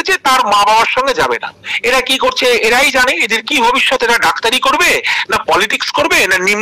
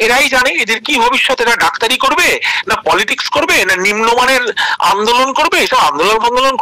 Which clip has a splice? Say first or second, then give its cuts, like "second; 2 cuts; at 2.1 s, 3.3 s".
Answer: first; 1 cut; at 1.7 s